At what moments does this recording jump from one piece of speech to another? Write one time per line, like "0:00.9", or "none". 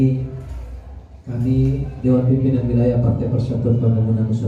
none